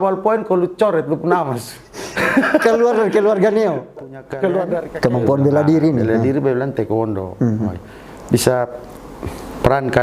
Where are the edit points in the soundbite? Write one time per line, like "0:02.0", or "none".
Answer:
0:04.9